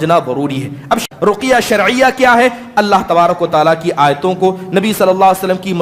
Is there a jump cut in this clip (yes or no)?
yes